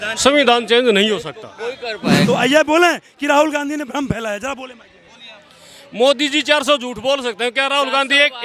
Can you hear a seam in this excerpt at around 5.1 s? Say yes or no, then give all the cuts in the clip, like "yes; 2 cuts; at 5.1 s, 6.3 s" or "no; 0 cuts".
no; 1 cut; at 2.1 s